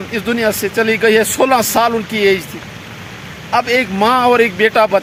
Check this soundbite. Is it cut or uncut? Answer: uncut